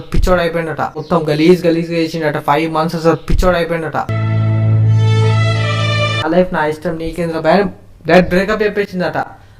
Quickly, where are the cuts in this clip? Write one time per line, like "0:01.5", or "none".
0:01.0
0:04.1
0:06.2